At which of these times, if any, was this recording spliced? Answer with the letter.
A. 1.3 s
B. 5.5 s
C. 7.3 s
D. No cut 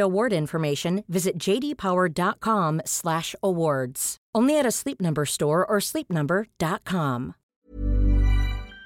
C